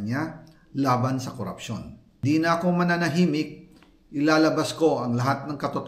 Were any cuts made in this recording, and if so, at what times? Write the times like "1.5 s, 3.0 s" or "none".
2.2 s